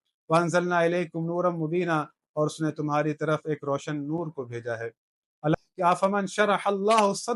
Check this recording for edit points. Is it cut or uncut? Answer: cut